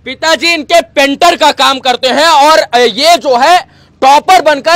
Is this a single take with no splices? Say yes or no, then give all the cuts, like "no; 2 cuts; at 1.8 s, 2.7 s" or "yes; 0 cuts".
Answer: yes; 0 cuts